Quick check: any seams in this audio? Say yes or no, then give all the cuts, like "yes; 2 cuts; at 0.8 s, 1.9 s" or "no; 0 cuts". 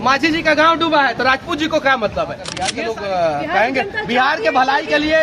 yes; 1 cut; at 2.7 s